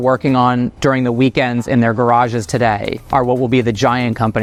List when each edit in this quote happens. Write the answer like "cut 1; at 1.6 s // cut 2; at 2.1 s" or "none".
none